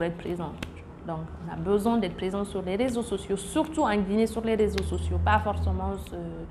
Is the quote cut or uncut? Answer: uncut